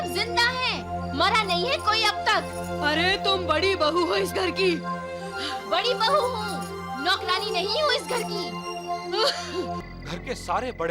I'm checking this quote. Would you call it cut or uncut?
cut